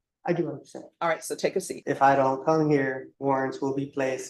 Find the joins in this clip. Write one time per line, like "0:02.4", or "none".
0:01.7
0:03.1